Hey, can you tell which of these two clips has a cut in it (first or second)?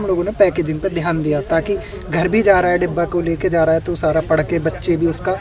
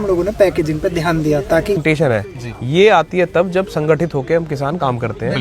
second